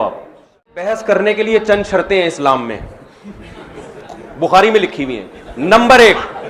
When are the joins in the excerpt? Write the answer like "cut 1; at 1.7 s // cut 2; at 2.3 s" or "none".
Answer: cut 1; at 0.9 s

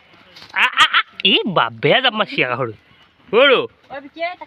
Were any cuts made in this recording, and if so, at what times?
none

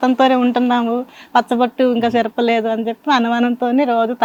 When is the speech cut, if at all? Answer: none

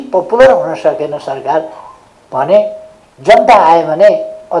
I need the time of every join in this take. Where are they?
none

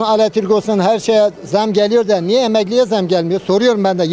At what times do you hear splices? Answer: none

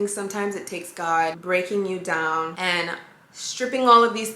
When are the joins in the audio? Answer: cut 1; at 1.4 s // cut 2; at 2.5 s

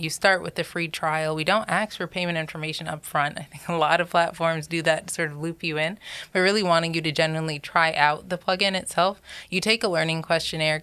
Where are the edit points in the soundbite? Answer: none

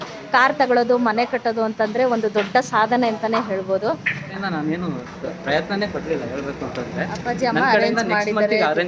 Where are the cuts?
cut 1; at 4.4 s

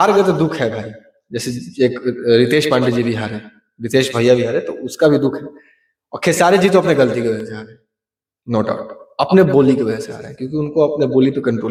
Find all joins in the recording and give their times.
none

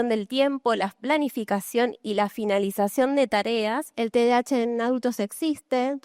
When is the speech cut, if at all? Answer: cut 1; at 4.0 s

